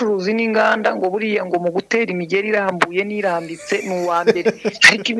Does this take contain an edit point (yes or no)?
no